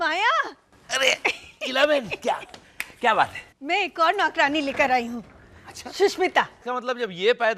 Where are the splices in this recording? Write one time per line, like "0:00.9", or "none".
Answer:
0:06.6